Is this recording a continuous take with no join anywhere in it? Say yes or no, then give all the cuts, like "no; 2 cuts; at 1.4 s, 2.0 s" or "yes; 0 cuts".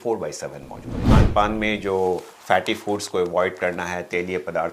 no; 1 cut; at 1.0 s